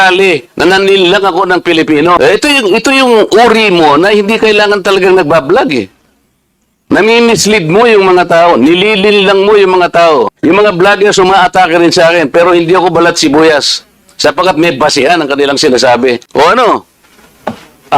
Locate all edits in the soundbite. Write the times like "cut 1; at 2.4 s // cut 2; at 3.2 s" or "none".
cut 1; at 2.2 s // cut 2; at 10.3 s // cut 3; at 16.2 s